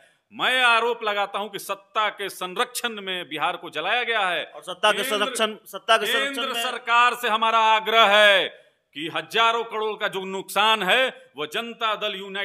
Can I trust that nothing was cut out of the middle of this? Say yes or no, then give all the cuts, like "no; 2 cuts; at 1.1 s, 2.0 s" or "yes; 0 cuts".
yes; 0 cuts